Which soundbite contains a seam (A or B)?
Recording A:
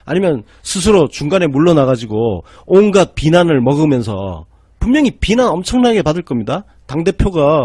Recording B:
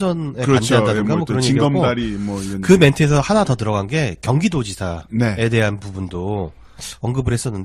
A